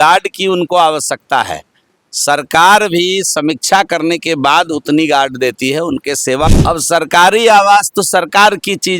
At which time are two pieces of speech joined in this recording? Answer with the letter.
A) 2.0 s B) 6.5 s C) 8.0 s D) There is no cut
B